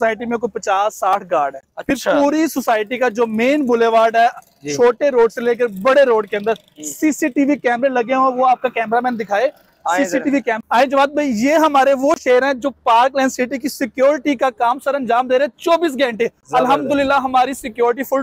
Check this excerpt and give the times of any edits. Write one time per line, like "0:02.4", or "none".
none